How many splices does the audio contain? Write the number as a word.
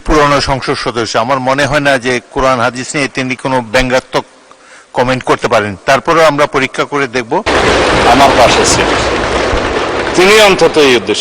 one